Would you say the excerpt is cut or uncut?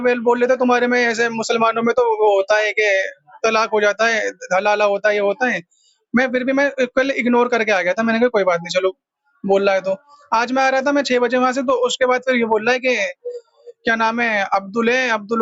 uncut